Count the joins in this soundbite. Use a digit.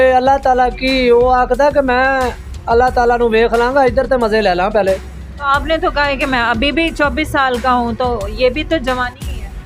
0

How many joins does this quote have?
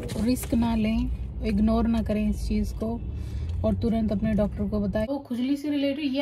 1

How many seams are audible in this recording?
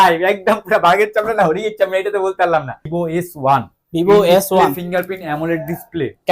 1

